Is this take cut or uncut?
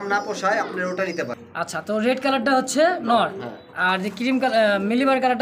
cut